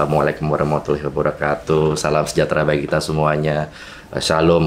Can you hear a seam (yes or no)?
no